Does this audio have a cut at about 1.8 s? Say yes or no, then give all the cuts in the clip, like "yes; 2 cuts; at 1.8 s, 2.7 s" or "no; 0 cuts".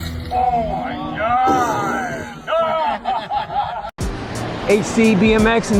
no; 0 cuts